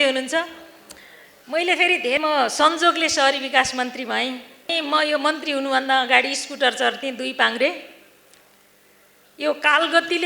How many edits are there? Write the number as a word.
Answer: two